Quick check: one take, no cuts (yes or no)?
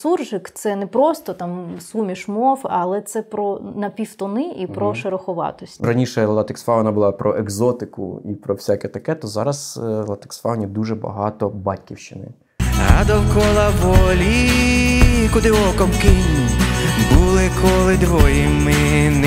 no